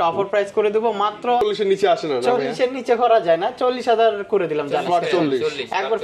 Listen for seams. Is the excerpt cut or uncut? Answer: cut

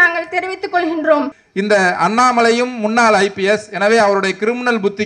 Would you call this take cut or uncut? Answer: cut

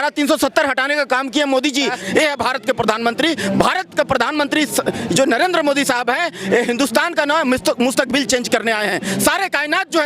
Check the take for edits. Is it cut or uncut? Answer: cut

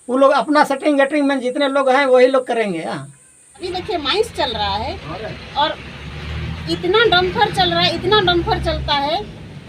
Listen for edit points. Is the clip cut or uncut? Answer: cut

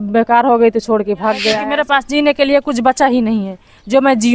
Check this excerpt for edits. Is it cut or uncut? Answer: cut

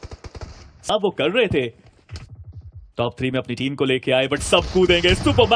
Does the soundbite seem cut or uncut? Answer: cut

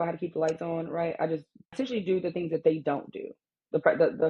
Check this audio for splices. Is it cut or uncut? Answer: cut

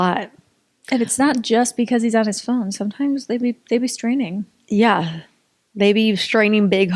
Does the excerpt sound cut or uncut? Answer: uncut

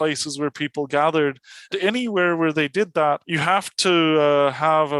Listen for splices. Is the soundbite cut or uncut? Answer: cut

